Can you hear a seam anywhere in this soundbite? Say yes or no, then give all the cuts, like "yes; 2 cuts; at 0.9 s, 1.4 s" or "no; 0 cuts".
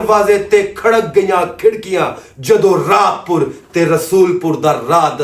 no; 0 cuts